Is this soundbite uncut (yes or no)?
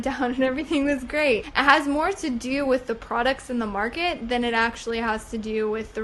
yes